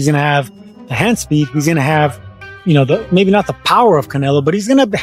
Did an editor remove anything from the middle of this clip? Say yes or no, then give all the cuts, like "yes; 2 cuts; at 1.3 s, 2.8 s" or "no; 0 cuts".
no; 0 cuts